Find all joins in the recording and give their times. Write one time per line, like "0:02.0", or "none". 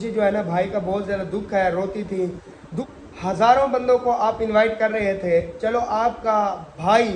0:02.8